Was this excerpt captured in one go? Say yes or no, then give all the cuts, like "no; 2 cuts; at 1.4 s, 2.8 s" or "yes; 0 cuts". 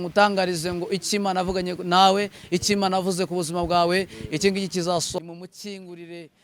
no; 1 cut; at 5.1 s